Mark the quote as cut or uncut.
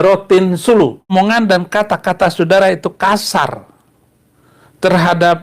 cut